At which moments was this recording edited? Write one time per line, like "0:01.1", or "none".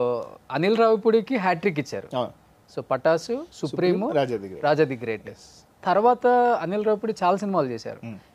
none